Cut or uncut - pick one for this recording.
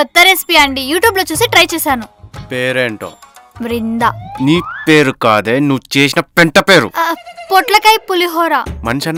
uncut